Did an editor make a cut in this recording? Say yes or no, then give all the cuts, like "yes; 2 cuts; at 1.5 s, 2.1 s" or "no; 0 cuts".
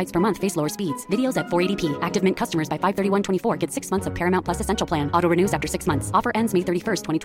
no; 0 cuts